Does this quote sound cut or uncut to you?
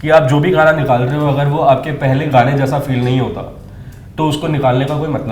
uncut